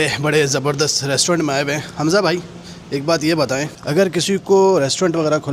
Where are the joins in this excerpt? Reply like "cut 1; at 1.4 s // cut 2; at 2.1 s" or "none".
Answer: none

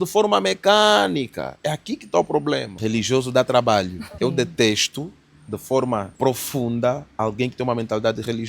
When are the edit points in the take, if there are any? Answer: cut 1; at 2.7 s // cut 2; at 4.1 s // cut 3; at 6.1 s

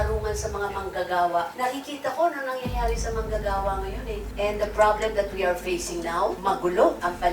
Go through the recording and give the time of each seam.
cut 1; at 4.2 s

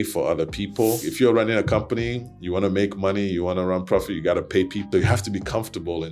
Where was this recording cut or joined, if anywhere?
cut 1; at 1.1 s // cut 2; at 4.9 s

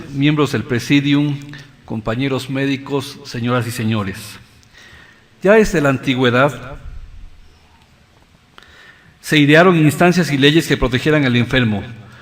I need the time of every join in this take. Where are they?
none

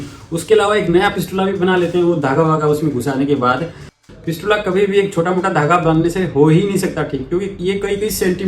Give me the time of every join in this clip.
cut 1; at 4.0 s

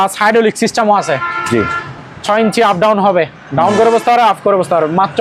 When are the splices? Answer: none

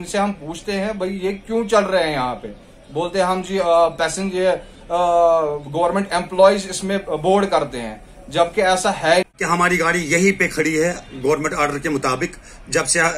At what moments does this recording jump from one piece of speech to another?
cut 1; at 9.3 s

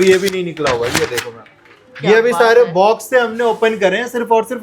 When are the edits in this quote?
none

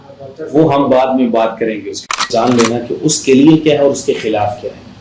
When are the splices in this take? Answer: cut 1; at 2.3 s

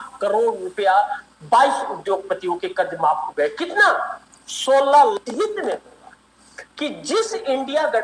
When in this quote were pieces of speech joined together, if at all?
cut 1; at 5.2 s

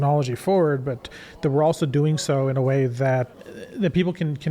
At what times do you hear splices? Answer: cut 1; at 3.3 s

